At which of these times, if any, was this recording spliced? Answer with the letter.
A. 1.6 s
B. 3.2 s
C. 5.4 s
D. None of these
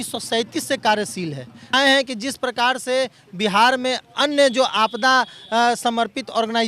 A